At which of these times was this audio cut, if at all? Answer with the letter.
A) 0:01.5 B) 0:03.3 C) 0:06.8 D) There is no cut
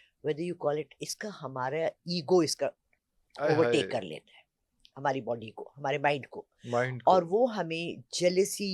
D